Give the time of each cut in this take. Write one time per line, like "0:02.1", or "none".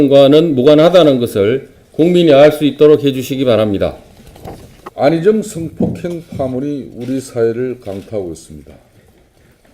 0:01.3